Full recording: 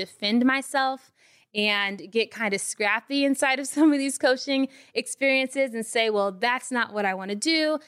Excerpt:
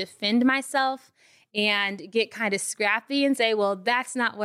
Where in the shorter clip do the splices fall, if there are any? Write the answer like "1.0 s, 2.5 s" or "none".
3.4 s